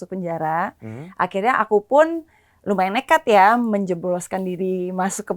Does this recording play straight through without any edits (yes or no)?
yes